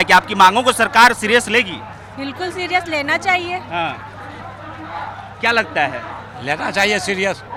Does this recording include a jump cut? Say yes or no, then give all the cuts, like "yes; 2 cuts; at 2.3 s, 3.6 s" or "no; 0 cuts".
no; 0 cuts